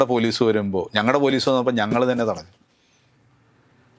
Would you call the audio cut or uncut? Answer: uncut